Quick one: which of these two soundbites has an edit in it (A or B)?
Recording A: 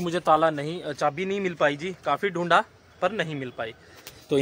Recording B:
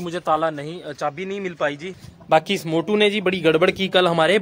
B